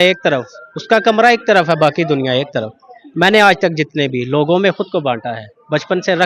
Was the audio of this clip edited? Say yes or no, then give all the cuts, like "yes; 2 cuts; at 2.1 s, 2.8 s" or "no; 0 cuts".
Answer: no; 0 cuts